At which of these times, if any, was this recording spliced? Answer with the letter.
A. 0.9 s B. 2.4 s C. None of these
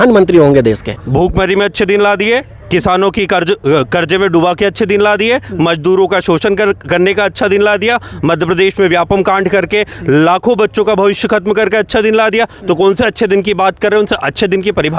A